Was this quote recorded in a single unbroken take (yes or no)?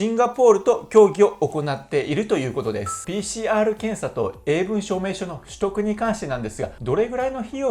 no